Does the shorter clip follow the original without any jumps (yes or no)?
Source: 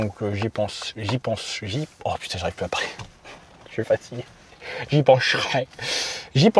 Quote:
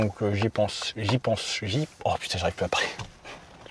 yes